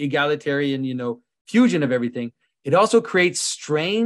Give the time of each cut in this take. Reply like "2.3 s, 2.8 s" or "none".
none

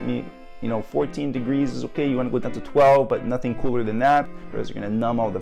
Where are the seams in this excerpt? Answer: 4.3 s

